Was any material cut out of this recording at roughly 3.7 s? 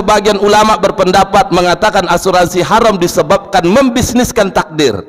no; 0 cuts

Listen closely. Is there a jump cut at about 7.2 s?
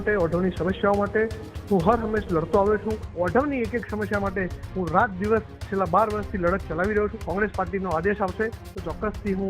yes; 2 cuts; at 3.0 s, 7.2 s

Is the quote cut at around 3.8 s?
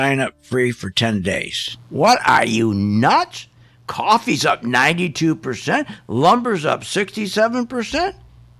no; 1 cut; at 1.9 s

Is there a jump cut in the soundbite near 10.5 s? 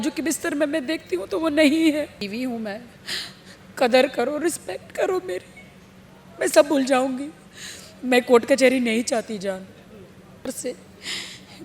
yes; 2 cuts; at 2.2 s, 10.5 s

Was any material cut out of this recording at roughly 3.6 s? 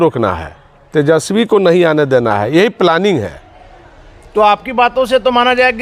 no; 0 cuts

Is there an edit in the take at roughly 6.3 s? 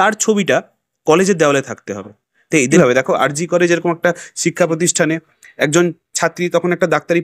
no; 1 cut; at 2.7 s

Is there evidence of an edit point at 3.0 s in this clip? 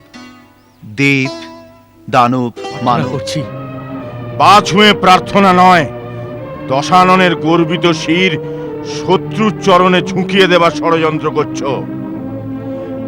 yes; 1 cut; at 3.0 s

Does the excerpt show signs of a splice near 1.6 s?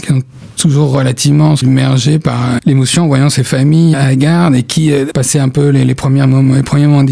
yes; 4 cuts; at 1.6 s, 2.6 s, 3.9 s, 5.1 s

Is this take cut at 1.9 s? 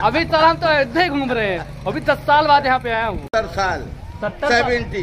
no; 1 cut; at 3.3 s

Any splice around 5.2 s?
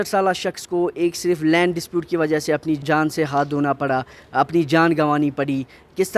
no; 1 cut; at 2.8 s

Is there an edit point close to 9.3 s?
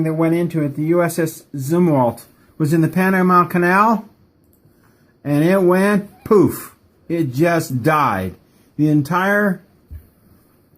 no; 1 cut; at 1.6 s

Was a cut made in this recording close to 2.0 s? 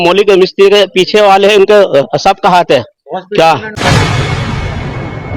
no; 1 cut; at 3.7 s

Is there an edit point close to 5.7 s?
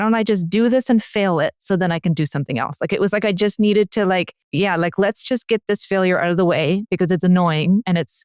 no; 1 cut; at 4.4 s

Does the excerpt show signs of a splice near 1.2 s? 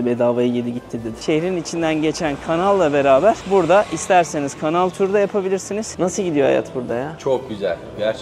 yes; 2 cuts; at 1.2 s, 5.9 s

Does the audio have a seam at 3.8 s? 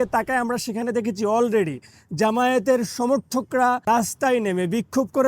yes; 1 cut; at 3.8 s

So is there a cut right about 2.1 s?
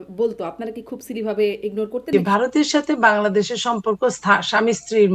yes; 1 cut; at 2.1 s

